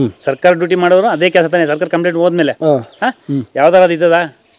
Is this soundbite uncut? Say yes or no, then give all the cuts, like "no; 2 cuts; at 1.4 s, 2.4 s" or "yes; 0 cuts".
yes; 0 cuts